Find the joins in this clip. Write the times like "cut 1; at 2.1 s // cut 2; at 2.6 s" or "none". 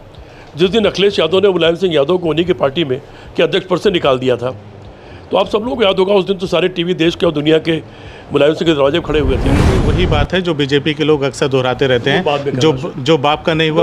cut 1; at 9.7 s